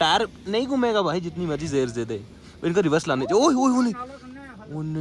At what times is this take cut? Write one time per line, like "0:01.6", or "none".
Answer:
none